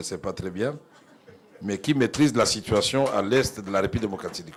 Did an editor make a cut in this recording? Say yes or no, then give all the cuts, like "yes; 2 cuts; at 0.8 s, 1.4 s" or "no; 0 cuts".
no; 0 cuts